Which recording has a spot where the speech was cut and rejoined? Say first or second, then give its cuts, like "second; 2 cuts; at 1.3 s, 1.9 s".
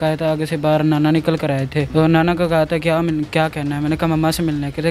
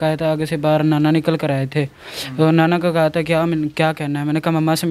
first; 1 cut; at 1.8 s